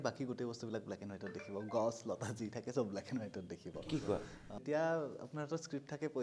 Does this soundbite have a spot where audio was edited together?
yes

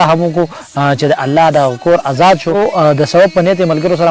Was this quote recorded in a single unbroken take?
no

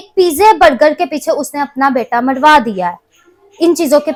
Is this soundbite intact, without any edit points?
yes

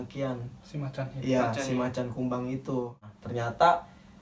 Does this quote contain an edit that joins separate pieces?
yes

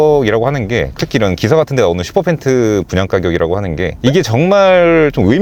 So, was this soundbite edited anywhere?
no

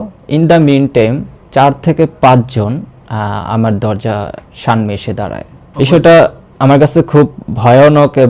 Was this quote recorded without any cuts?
yes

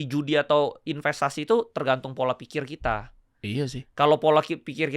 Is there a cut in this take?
no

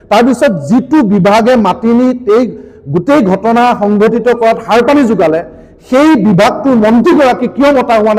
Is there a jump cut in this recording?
no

